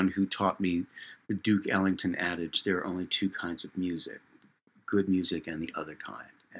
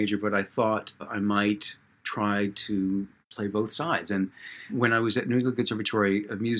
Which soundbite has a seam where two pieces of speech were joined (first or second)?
second